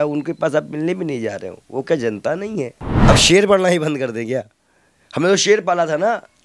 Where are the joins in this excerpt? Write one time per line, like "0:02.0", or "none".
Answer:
0:02.9